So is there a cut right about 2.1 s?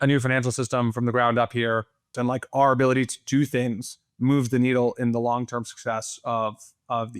yes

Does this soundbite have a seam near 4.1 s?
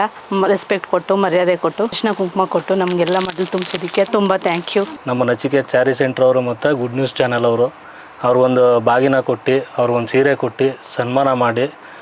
yes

